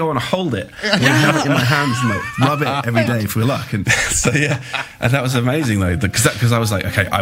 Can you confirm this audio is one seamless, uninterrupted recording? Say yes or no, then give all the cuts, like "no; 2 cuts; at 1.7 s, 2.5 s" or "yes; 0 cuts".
no; 1 cut; at 3.8 s